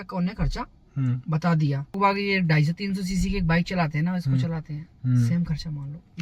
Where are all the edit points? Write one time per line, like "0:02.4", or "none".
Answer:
0:02.0